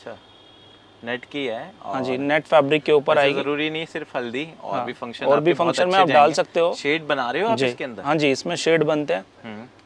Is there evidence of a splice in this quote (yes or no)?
no